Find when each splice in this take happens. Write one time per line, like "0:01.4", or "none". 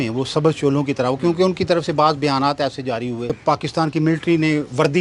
0:03.3